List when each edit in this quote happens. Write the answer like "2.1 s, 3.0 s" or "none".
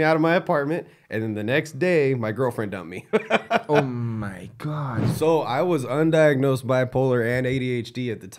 5.0 s